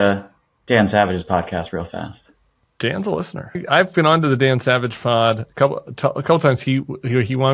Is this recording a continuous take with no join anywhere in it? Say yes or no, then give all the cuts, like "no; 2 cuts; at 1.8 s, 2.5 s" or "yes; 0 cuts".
no; 1 cut; at 3.6 s